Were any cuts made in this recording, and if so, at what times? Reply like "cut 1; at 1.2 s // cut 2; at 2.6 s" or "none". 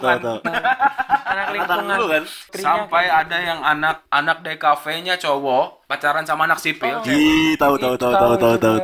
cut 1; at 2.4 s // cut 2; at 4.0 s // cut 3; at 5.8 s